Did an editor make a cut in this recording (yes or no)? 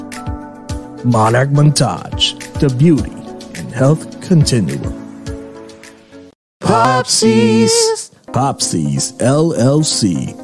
yes